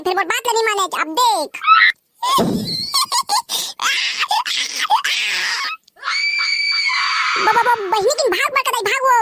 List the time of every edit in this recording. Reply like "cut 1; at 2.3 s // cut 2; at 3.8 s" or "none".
none